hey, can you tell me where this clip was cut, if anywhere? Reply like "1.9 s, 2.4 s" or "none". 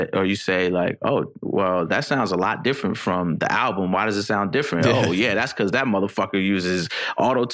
none